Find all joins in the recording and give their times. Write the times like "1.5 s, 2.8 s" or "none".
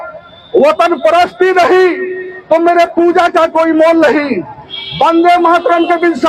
none

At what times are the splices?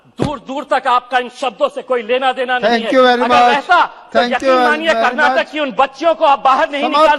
none

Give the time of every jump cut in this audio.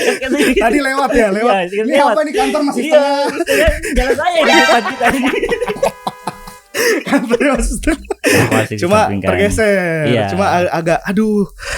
8.5 s

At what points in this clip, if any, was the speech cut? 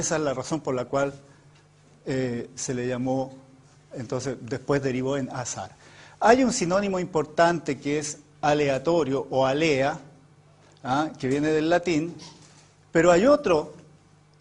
5.9 s

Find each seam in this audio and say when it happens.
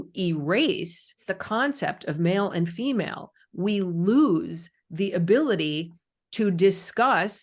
1.3 s

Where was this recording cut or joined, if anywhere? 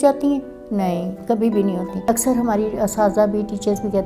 2.0 s

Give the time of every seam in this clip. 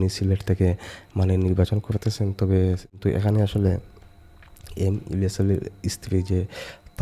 3.0 s

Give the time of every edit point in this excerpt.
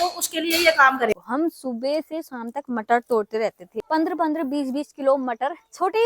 1.1 s, 3.7 s

